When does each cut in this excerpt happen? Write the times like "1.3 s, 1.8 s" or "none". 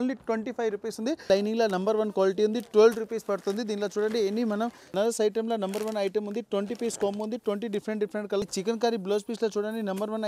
1.3 s, 4.9 s, 8.4 s

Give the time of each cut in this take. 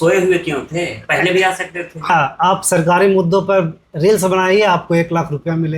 2.1 s

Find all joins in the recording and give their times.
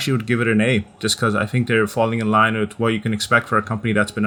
none

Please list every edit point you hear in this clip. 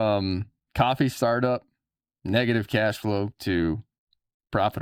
none

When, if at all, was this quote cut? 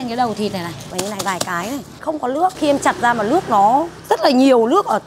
0.9 s, 2.2 s, 3.9 s

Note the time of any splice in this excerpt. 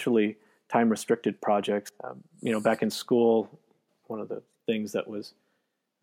1.9 s, 4.0 s

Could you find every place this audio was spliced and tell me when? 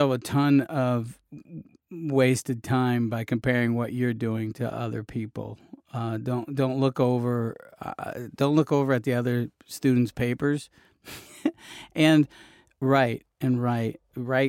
none

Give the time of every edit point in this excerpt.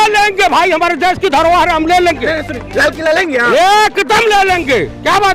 none

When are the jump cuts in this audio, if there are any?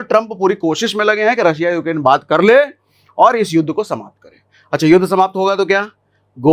none

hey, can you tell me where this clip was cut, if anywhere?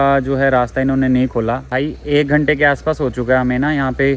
1.6 s

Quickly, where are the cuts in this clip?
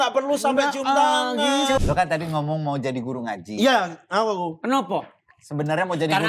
1.8 s

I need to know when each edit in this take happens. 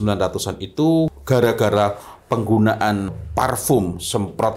1.1 s, 3.2 s

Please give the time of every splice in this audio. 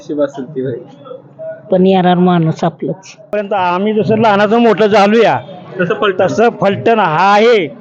3.3 s

